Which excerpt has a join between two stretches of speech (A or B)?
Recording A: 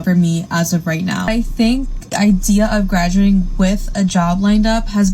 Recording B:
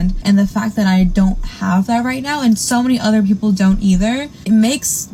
A